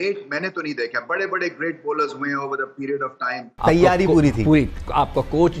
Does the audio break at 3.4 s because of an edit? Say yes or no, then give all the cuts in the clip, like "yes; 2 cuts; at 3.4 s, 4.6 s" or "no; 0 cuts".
yes; 1 cut; at 3.4 s